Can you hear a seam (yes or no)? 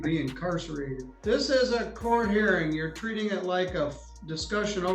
yes